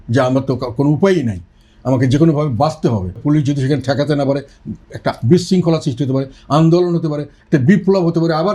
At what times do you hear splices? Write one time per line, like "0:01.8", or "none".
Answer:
0:03.2